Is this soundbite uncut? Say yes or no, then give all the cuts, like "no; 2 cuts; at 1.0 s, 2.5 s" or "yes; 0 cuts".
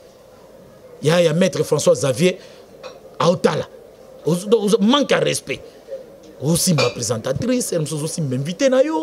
yes; 0 cuts